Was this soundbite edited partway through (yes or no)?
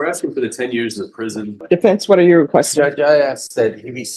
yes